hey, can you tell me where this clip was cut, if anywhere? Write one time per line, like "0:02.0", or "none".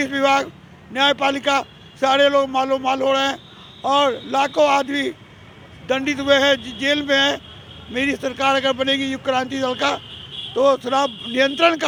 none